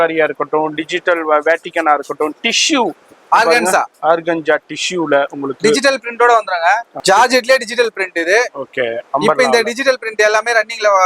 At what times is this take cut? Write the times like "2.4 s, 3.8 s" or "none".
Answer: 6.9 s